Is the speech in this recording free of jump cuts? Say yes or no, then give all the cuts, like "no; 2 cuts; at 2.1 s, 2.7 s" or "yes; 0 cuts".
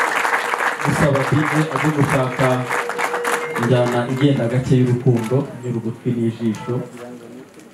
yes; 0 cuts